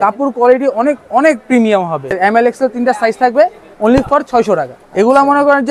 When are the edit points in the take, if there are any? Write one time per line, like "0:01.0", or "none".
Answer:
0:02.1
0:04.8